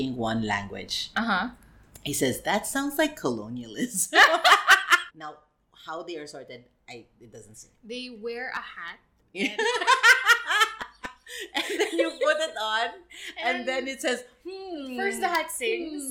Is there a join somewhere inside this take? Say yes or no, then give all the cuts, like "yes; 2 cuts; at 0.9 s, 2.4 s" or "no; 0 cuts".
yes; 2 cuts; at 1.0 s, 5.1 s